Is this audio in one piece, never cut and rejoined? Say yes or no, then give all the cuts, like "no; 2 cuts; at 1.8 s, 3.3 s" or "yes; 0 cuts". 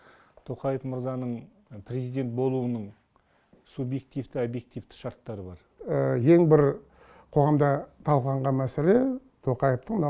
no; 1 cut; at 5.8 s